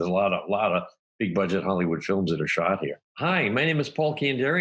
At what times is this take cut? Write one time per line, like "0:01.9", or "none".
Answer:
0:03.1